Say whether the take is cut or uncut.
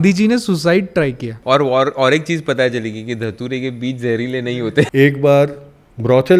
cut